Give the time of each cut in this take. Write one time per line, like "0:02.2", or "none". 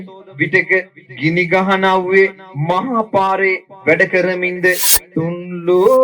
0:04.9